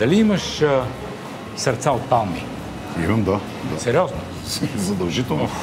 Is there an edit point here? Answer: no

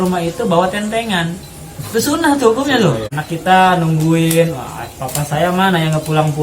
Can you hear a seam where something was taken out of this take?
yes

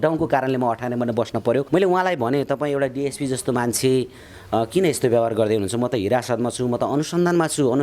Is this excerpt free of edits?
no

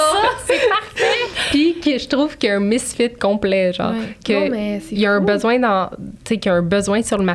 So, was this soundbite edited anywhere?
no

